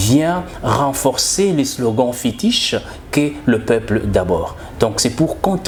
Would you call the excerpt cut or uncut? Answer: uncut